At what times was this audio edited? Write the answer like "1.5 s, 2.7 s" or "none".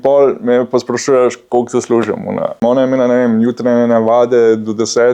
2.6 s